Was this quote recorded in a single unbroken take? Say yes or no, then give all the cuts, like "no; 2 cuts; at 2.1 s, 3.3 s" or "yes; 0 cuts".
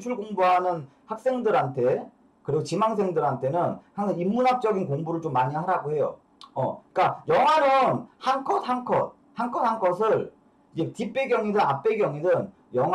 no; 1 cut; at 6.2 s